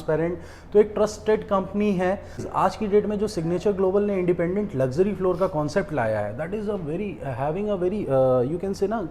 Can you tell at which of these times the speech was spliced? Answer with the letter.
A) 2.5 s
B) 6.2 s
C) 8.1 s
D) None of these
A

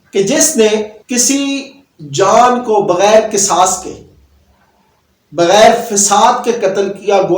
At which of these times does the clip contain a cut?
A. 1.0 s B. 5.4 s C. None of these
A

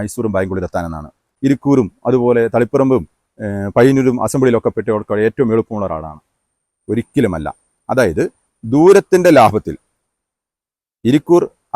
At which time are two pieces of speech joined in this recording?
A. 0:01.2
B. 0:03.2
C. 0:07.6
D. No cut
A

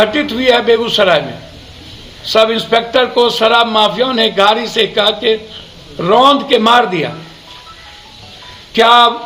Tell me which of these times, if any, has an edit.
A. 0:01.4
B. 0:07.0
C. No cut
C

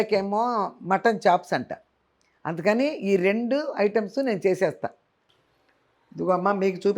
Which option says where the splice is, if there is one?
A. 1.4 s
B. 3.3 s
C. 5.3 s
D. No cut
C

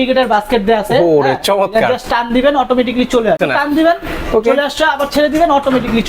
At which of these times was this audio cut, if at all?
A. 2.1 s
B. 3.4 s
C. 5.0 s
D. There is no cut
B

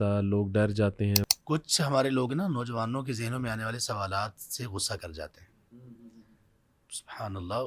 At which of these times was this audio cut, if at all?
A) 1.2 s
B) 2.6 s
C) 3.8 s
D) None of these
A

